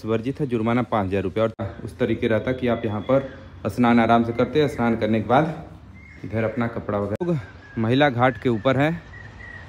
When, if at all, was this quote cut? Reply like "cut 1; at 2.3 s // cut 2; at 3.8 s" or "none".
cut 1; at 1.6 s // cut 2; at 7.2 s

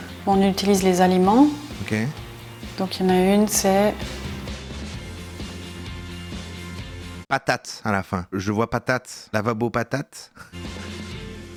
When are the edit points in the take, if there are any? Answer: none

